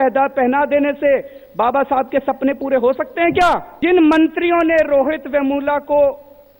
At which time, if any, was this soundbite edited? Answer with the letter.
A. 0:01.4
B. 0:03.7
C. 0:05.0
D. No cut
B